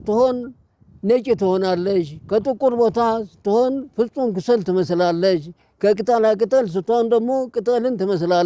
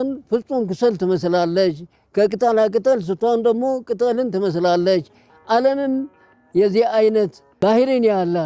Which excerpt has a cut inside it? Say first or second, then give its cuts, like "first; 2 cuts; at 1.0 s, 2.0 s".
second; 1 cut; at 7.4 s